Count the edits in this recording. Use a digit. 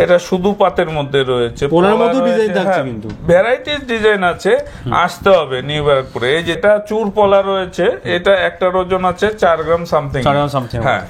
0